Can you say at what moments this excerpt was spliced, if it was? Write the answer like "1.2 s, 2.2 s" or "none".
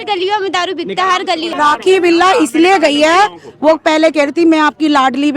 1.5 s